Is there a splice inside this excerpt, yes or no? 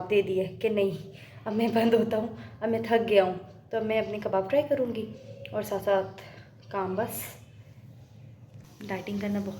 yes